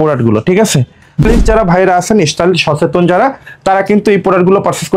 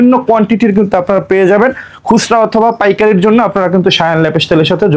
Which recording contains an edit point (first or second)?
first